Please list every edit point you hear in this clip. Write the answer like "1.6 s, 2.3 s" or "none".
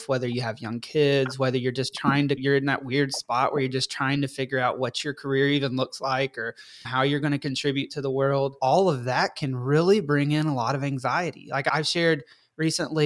none